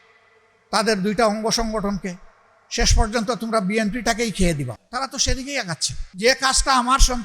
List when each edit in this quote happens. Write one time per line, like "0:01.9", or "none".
0:04.8
0:06.0